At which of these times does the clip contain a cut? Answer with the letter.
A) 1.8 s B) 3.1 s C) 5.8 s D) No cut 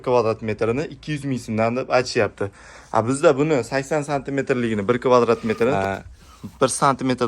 C